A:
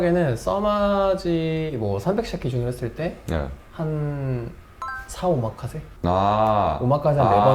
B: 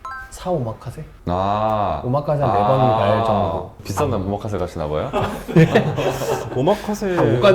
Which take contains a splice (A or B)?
B